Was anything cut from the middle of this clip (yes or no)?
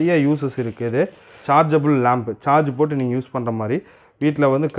yes